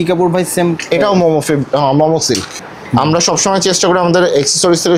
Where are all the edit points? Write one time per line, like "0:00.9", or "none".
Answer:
0:02.6